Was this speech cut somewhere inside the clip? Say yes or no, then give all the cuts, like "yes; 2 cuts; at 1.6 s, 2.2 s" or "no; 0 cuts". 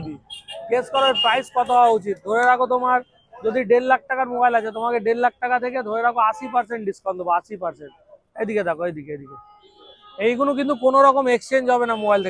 no; 0 cuts